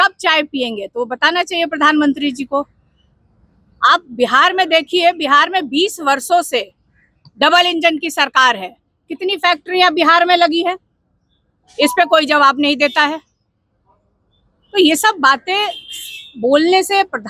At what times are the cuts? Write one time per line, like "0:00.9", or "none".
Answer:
none